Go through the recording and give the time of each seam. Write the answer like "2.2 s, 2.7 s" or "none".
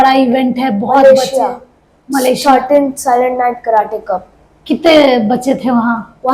none